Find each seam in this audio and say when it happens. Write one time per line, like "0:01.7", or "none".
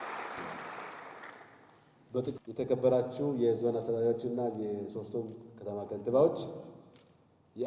0:02.4